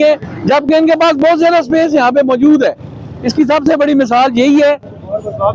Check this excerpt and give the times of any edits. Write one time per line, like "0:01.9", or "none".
none